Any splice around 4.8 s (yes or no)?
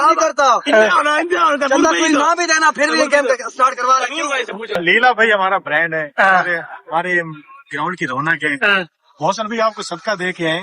yes